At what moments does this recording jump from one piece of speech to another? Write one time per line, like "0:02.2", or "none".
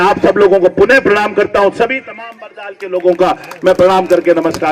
none